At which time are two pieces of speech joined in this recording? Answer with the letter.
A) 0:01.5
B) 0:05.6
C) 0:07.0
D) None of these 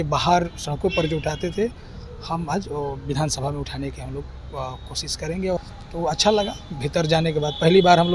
B